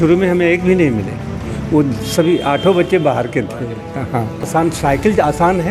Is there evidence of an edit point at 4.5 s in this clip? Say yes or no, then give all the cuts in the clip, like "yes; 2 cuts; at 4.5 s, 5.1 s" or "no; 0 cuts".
yes; 1 cut; at 4.5 s